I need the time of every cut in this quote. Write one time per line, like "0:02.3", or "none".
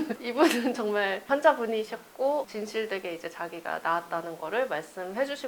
none